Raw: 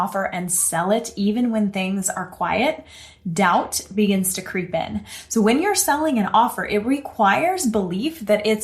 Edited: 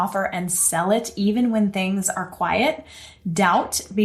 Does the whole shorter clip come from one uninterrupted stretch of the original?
yes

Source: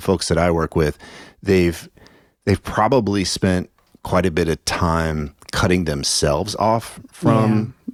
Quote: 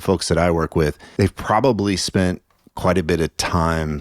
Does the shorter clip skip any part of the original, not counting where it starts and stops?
yes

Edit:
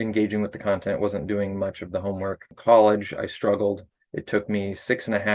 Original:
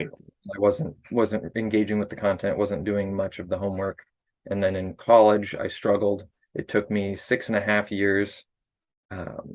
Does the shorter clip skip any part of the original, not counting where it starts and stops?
yes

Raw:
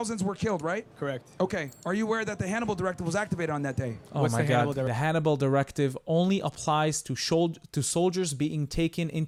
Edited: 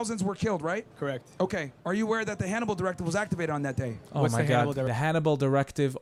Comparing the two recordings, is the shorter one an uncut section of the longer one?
yes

